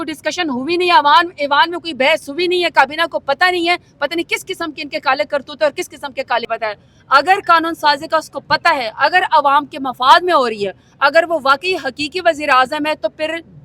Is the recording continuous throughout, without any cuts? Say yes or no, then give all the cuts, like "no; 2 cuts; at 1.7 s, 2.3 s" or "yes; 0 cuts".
no; 1 cut; at 6.5 s